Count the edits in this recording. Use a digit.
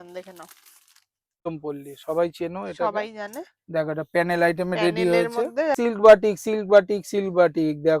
2